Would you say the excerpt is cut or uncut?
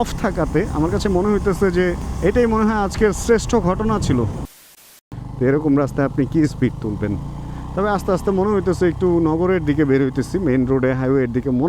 cut